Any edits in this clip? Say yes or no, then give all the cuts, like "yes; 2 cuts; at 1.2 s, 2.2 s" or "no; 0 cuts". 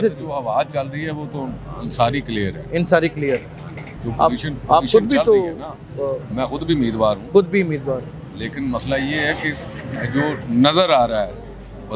no; 0 cuts